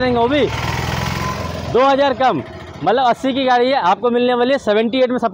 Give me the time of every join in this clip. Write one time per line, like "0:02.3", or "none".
none